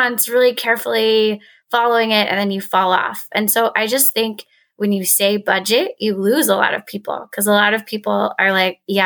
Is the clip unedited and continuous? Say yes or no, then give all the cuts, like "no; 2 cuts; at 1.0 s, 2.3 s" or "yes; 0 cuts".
yes; 0 cuts